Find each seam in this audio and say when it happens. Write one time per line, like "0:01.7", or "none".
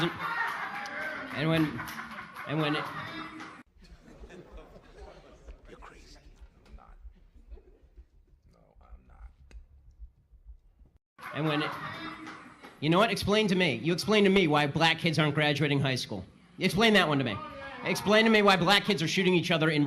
0:18.9